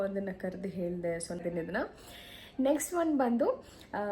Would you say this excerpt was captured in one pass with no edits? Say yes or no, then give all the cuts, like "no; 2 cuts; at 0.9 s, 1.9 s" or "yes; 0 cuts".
no; 1 cut; at 1.4 s